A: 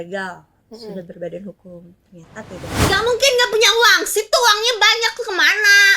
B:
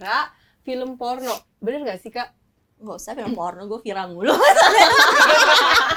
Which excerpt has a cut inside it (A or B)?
A